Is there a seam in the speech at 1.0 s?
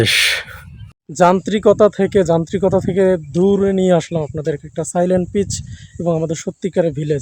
yes; 1 cut; at 1.0 s

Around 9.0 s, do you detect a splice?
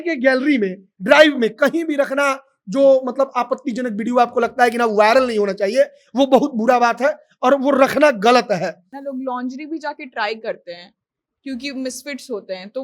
yes; 1 cut; at 9.0 s

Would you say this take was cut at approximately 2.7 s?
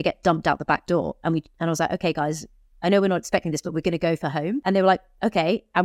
no; 1 cut; at 4.6 s

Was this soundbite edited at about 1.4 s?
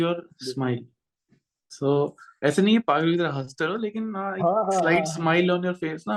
no; 0 cuts

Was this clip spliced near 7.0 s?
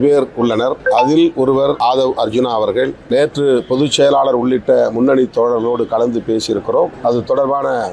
yes; 4 cuts; at 0.8 s, 1.8 s, 3.0 s, 7.0 s

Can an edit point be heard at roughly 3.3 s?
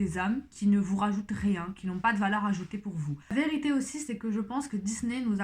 yes; 1 cut; at 3.3 s

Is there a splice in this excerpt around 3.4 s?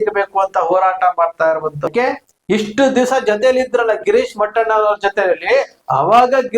no; 1 cut; at 1.9 s

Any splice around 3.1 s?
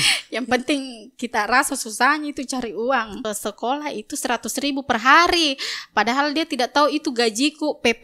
yes; 1 cut; at 3.1 s

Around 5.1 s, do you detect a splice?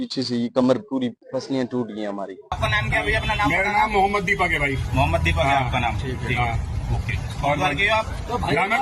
no; 2 cuts; at 1.2 s, 2.6 s

